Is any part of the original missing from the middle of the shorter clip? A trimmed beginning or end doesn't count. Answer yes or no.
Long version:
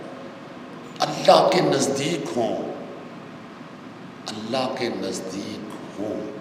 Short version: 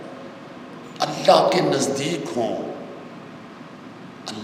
no